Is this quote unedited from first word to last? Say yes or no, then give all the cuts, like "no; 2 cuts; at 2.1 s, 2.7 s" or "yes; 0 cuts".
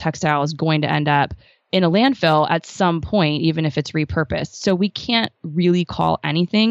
yes; 0 cuts